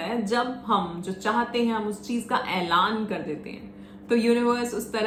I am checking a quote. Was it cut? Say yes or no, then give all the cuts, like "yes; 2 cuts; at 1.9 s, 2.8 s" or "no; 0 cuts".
no; 0 cuts